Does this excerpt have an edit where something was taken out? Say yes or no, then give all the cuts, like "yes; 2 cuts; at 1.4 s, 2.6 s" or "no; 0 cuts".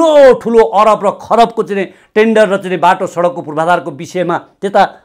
no; 0 cuts